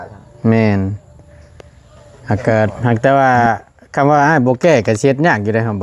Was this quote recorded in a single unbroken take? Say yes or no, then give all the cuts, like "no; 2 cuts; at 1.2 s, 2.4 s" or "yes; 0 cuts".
no; 1 cut; at 2.8 s